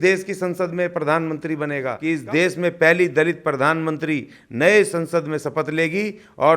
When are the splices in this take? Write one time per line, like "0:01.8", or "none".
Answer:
0:01.9